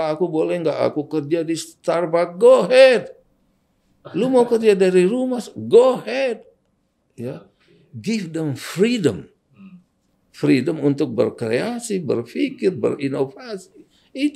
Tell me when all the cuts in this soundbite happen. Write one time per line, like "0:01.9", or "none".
none